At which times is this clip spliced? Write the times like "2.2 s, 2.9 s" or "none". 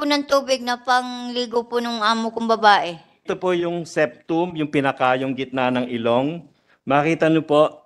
3.2 s